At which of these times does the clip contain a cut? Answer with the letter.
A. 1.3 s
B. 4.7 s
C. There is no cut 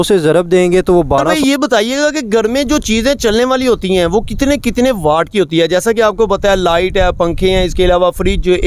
A